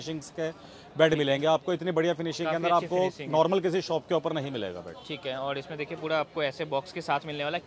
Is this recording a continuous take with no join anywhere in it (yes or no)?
yes